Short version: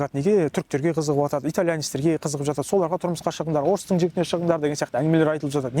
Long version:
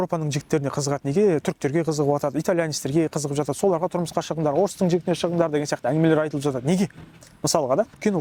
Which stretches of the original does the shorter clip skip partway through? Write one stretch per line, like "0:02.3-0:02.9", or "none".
none